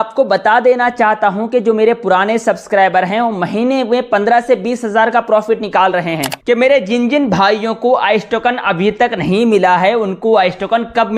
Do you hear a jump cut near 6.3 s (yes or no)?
yes